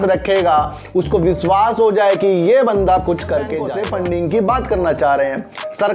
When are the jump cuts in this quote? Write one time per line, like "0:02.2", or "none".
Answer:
0:03.6